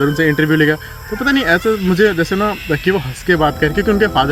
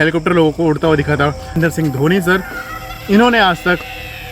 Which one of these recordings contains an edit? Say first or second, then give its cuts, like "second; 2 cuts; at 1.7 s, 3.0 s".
second; 1 cut; at 1.6 s